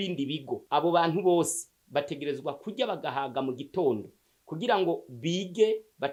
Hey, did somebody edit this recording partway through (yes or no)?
no